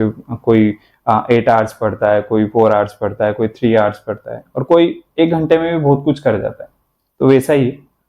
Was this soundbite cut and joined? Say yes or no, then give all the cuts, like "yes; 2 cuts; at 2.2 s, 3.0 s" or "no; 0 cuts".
no; 0 cuts